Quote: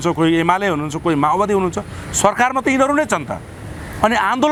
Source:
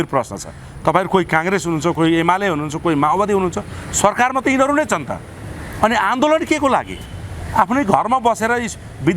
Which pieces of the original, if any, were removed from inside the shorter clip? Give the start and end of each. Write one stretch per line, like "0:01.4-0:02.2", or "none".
none